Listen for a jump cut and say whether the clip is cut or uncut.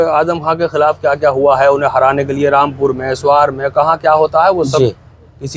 uncut